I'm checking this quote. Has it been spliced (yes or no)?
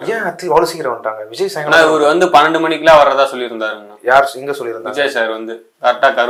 no